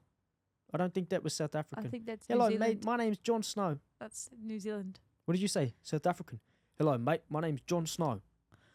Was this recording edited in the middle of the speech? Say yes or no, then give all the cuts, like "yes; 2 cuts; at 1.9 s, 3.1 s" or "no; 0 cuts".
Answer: no; 0 cuts